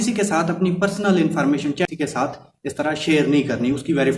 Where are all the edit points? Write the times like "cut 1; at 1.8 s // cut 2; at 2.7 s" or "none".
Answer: cut 1; at 1.8 s